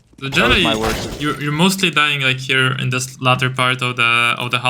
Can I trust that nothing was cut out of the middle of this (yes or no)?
yes